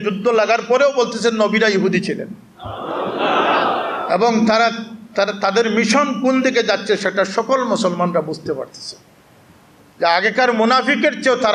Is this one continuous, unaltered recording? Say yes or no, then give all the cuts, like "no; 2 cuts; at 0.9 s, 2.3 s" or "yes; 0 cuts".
yes; 0 cuts